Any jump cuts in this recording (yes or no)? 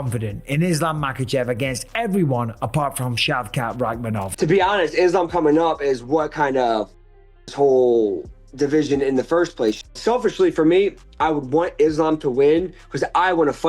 yes